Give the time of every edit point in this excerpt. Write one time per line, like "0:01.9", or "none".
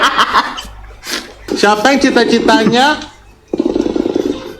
0:01.5